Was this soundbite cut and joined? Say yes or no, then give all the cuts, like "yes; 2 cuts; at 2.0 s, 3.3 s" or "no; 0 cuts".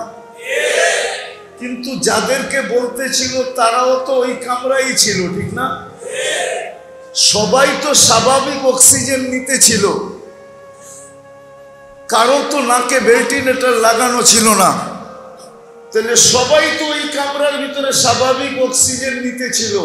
yes; 2 cuts; at 10.3 s, 12.1 s